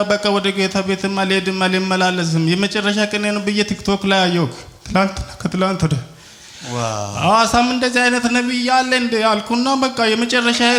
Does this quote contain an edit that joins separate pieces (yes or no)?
no